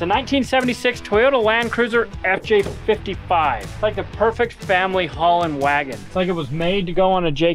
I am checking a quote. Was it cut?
yes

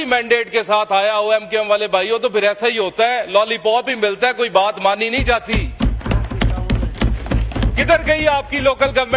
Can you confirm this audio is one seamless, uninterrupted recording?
yes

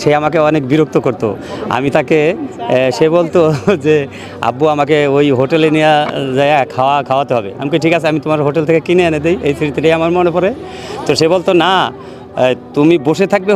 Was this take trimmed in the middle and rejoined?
no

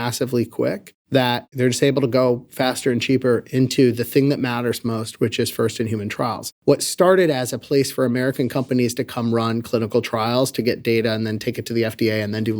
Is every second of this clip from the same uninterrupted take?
no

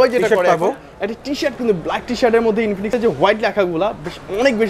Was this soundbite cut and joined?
no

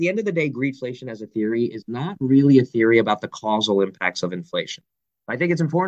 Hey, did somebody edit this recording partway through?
no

